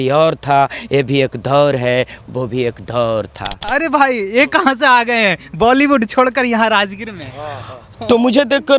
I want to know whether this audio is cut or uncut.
cut